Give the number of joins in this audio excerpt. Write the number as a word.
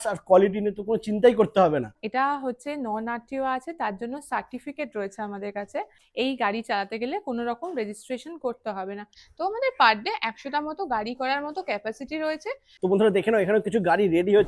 four